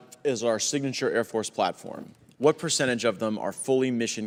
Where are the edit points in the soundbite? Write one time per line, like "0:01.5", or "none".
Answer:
none